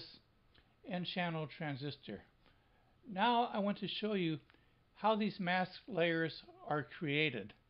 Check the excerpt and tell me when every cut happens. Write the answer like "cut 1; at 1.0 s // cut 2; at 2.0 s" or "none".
cut 1; at 4.8 s

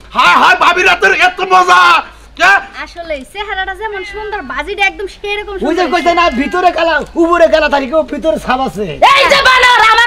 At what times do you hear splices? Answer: none

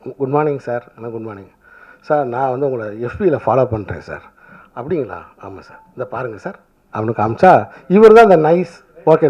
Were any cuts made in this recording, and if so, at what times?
none

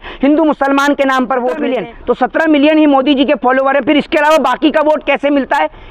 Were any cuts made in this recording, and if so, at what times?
cut 1; at 1.7 s

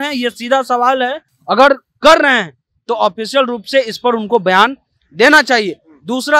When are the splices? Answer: none

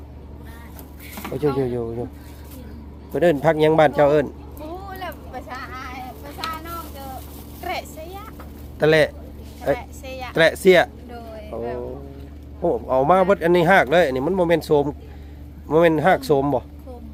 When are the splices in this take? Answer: none

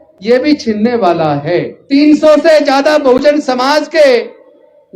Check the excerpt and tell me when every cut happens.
cut 1; at 1.7 s

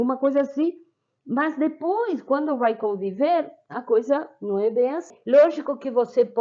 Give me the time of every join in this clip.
cut 1; at 5.1 s

